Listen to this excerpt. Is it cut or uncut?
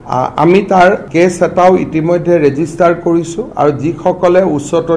cut